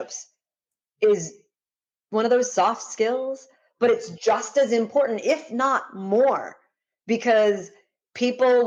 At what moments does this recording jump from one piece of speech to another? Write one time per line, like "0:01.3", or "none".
none

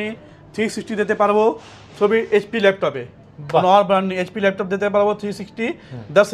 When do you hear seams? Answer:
none

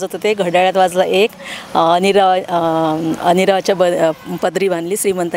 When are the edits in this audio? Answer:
none

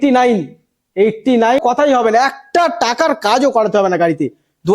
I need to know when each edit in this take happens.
0:01.6

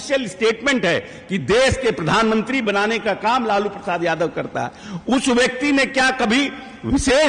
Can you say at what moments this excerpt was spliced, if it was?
none

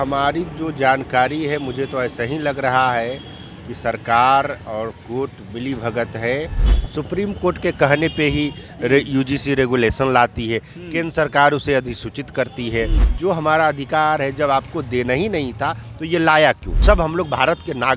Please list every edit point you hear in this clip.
0:06.7
0:13.0
0:16.7

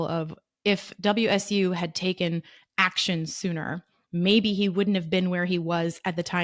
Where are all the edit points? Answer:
none

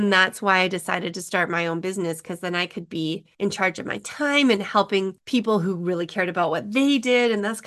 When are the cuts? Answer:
0:03.3
0:05.2

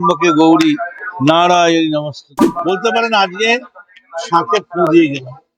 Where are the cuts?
0:02.4

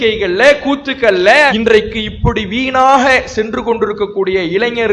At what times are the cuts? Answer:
0:01.5

